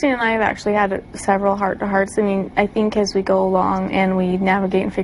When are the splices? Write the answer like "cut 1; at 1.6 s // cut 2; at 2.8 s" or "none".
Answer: none